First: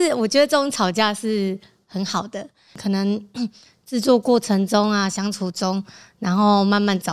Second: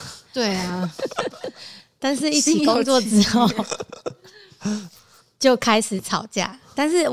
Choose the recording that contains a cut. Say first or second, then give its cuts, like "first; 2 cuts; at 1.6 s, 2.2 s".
first; 1 cut; at 2.8 s